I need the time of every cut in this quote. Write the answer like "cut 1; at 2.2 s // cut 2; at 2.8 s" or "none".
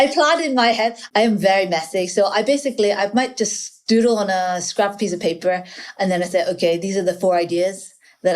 cut 1; at 1.0 s